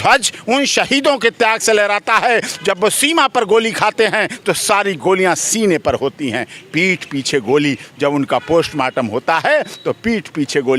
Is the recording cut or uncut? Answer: uncut